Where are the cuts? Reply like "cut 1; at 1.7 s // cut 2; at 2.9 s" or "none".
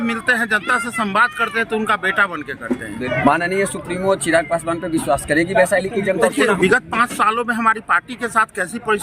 cut 1; at 3.0 s // cut 2; at 6.6 s